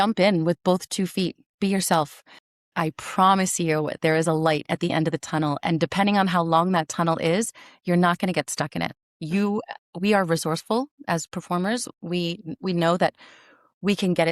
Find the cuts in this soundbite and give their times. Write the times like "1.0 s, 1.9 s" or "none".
2.6 s